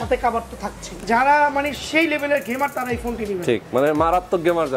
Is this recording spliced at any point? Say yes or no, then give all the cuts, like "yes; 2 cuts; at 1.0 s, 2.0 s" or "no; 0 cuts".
yes; 1 cut; at 1.0 s